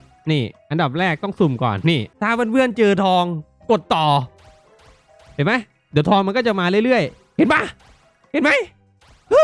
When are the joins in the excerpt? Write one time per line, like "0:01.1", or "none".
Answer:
0:02.1